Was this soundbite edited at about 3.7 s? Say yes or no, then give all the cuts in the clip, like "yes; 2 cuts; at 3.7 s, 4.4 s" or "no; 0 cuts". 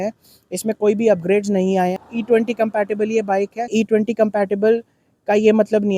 yes; 2 cuts; at 2.0 s, 3.7 s